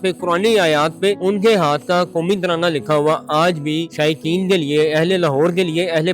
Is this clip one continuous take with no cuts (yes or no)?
no